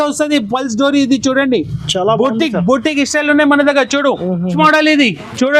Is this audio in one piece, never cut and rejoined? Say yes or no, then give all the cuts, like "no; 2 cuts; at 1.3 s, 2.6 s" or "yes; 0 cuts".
no; 1 cut; at 4.6 s